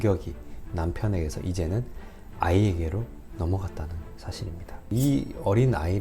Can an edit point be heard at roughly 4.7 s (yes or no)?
yes